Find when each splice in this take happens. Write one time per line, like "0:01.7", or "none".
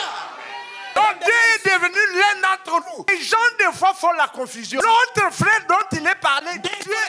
0:01.0
0:03.1
0:04.6